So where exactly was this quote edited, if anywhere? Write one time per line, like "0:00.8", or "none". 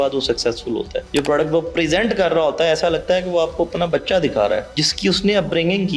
0:01.0
0:04.8